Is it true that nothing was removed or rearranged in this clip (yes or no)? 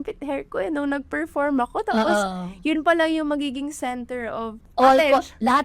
no